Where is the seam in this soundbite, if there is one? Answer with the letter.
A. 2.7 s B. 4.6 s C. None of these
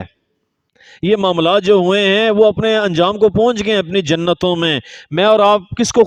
C